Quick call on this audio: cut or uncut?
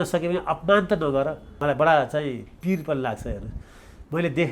cut